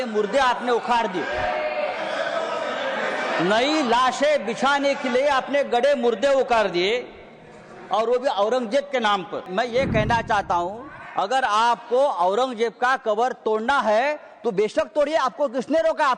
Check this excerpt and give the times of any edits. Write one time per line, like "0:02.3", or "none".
0:09.5